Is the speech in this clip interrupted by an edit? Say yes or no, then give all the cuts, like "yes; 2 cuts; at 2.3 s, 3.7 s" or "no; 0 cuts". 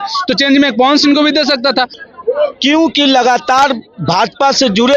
yes; 1 cut; at 2.0 s